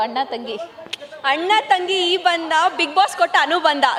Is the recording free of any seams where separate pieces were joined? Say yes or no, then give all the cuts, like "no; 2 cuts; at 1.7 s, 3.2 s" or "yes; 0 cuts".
yes; 0 cuts